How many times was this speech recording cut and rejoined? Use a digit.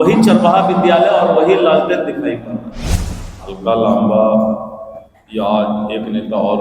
1